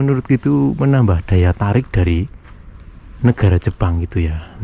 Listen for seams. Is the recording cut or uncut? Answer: uncut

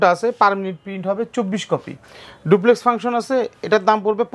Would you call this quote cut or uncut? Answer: uncut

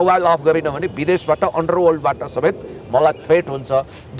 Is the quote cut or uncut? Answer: uncut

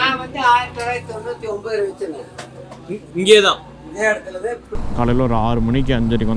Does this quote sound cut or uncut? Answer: cut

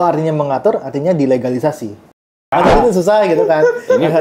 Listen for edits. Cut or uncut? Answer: cut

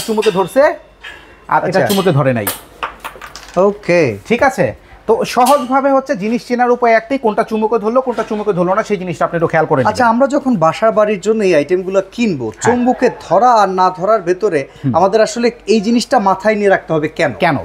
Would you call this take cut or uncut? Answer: uncut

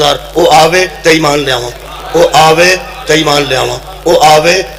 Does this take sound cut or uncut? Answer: uncut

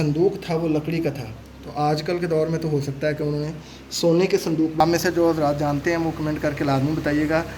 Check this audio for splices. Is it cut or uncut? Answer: cut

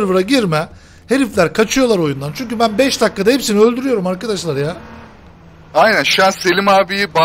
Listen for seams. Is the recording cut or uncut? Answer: uncut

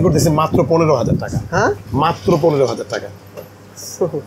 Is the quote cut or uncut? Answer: uncut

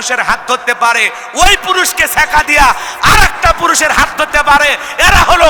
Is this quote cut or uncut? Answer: uncut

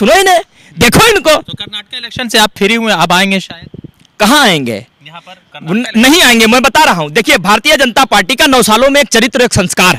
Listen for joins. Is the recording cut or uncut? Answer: uncut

